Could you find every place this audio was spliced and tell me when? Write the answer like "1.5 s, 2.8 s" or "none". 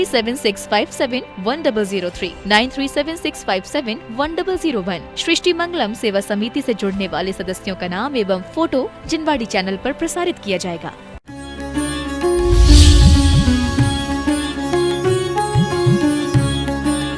11.2 s